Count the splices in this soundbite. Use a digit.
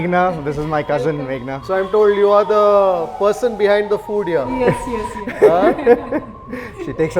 1